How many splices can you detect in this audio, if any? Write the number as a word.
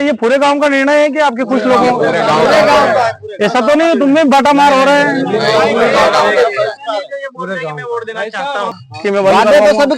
one